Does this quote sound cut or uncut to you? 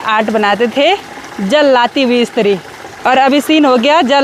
uncut